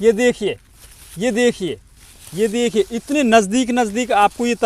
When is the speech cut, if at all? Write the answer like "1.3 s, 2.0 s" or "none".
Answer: none